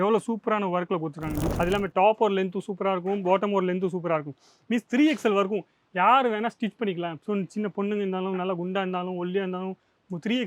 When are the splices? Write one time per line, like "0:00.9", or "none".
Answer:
0:01.5